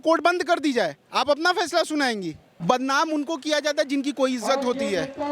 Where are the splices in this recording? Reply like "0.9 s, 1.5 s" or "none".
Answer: 2.5 s